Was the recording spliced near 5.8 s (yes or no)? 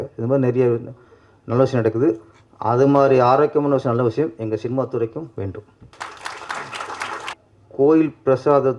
yes